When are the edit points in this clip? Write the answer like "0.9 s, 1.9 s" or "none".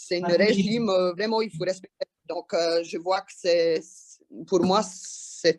none